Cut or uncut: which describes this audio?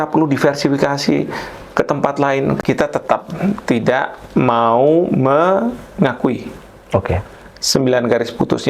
cut